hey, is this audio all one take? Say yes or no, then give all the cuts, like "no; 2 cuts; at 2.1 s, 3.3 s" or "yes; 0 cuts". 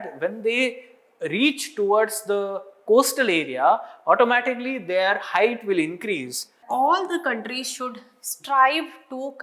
no; 1 cut; at 6.6 s